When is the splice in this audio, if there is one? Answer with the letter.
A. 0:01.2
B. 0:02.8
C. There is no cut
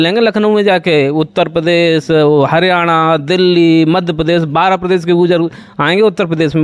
C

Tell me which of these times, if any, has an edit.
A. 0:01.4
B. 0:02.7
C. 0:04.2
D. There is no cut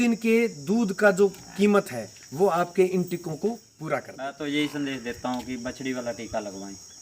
C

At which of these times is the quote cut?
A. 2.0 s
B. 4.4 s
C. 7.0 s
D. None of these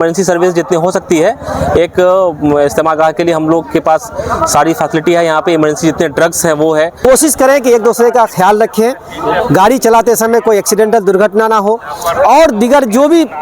C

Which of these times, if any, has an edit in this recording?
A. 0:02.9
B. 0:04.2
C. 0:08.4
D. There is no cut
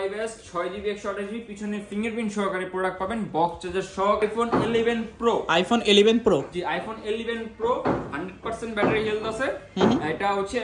B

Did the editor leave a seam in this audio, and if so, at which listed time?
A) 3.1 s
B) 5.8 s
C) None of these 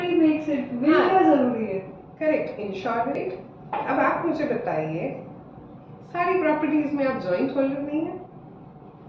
A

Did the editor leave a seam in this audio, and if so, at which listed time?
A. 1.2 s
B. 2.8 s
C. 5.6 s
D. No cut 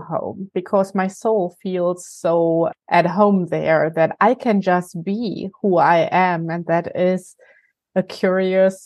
B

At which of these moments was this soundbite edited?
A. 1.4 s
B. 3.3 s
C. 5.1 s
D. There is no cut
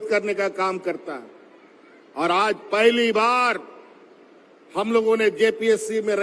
D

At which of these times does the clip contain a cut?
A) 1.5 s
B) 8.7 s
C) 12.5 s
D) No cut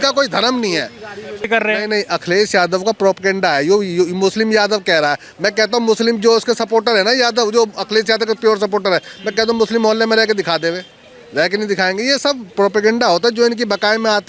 A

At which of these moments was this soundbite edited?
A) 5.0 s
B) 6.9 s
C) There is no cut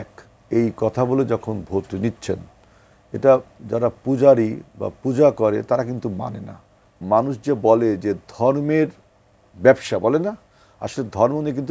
B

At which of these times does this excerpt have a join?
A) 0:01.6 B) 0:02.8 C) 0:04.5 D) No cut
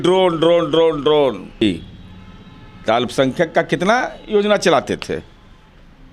A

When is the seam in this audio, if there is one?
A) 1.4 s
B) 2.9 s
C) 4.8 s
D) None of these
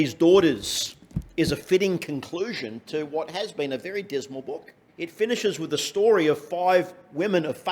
C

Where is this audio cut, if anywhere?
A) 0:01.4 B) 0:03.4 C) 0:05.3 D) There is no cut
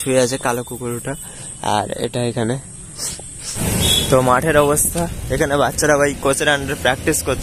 B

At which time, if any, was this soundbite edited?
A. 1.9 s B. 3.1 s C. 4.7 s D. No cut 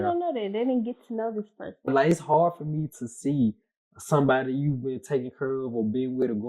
A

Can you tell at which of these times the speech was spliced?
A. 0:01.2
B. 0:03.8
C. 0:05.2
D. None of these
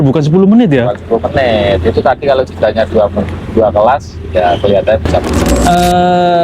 C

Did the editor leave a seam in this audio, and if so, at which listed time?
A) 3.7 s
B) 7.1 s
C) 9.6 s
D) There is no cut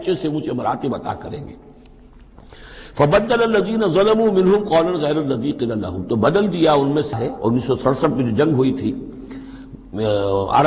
B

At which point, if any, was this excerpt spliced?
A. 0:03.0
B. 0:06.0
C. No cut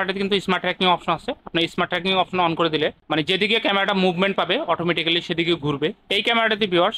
B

